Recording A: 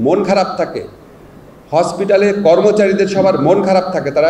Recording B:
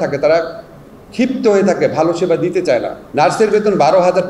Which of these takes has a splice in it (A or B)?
B